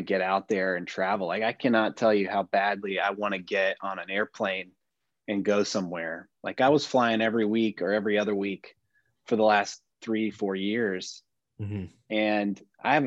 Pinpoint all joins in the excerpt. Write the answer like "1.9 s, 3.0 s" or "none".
none